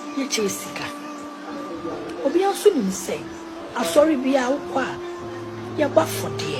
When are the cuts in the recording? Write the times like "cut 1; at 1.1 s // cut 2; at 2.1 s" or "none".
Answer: none